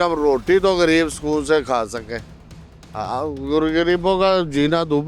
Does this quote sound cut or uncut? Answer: uncut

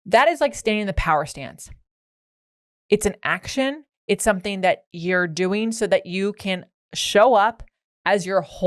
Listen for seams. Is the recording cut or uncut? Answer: uncut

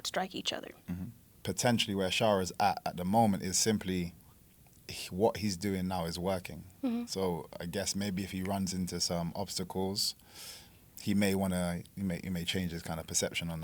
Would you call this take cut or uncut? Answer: cut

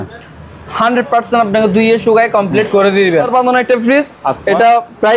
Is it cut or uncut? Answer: cut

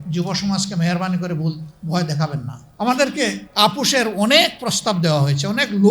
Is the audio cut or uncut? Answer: cut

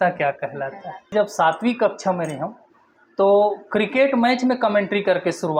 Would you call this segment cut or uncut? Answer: cut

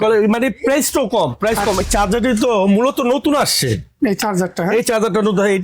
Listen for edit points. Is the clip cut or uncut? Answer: cut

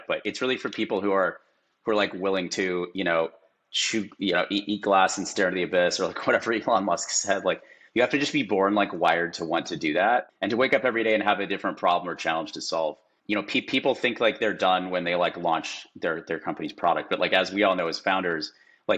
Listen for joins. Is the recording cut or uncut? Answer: uncut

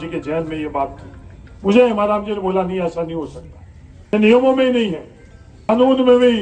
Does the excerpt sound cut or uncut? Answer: cut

